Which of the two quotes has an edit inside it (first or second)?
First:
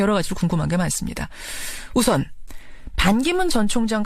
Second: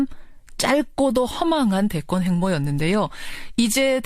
second